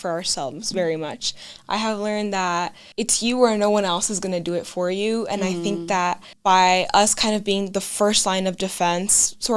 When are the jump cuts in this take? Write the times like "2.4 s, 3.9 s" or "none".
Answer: 2.8 s, 6.3 s